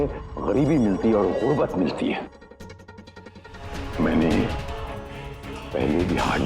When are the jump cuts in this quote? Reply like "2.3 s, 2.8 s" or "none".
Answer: 3.8 s